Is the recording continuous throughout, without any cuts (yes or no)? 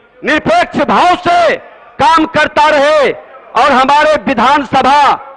yes